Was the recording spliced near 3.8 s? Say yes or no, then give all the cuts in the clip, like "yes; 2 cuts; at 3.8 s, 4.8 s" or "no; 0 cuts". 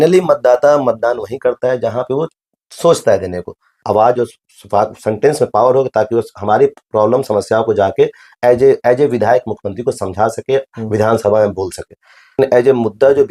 yes; 2 cuts; at 3.8 s, 12.4 s